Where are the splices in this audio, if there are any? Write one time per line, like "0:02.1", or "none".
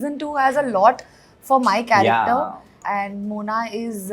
0:02.8

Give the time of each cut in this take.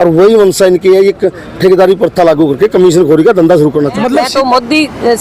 0:04.2

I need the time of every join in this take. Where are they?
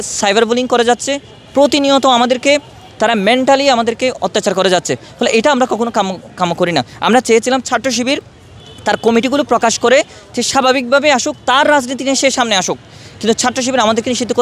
none

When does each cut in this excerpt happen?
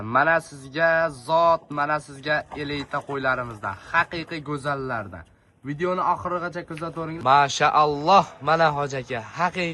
0:07.1

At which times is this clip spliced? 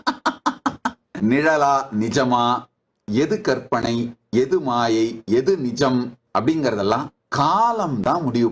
0:01.0
0:06.2
0:07.2

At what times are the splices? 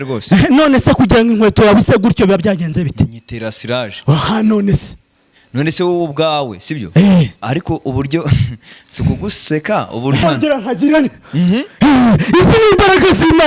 0:10.2

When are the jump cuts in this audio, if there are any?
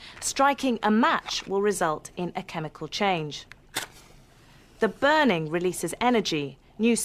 none

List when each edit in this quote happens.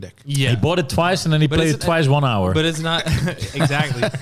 none

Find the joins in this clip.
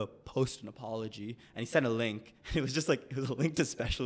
none

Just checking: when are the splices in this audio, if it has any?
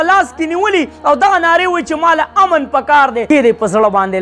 0:03.2

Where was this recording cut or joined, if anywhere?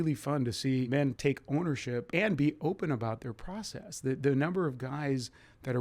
0:00.9
0:02.1

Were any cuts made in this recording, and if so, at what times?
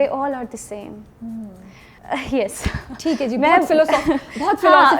none

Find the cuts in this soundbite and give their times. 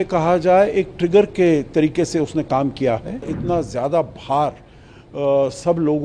0:03.3

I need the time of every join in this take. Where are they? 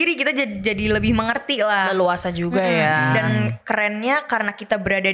none

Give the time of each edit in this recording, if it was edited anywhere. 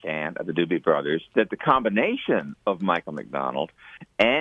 none

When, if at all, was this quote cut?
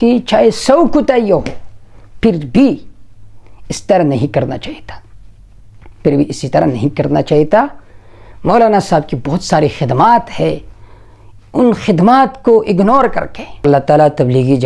0:13.6

